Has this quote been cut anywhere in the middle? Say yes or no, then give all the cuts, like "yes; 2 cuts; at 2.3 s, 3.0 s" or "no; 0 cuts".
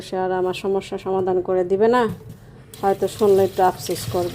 no; 0 cuts